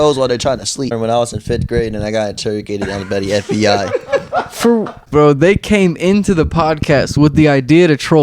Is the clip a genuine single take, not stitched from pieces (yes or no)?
no